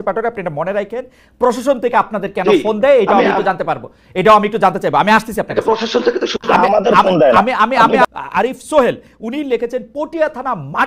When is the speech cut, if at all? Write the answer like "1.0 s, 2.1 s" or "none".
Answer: 8.1 s